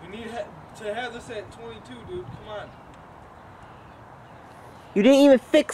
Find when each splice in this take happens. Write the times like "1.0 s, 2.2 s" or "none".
none